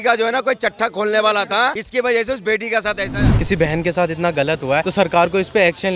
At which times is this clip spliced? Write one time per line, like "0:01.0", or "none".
0:01.8
0:03.3
0:04.9